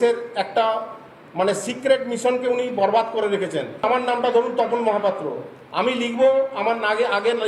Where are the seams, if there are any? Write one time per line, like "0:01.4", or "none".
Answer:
0:03.8